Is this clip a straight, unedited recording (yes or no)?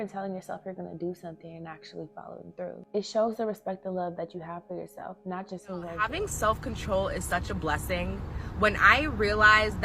no